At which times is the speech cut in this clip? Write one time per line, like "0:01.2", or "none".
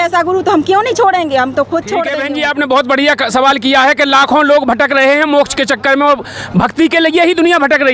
0:02.2